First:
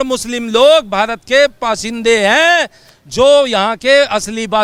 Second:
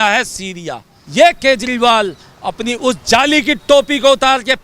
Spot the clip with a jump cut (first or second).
second